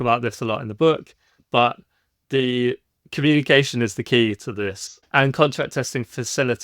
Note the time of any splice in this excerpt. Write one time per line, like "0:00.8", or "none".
0:05.0